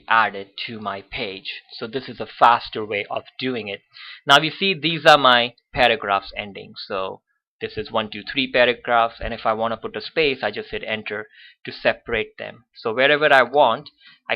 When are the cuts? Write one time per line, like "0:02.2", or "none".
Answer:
0:04.7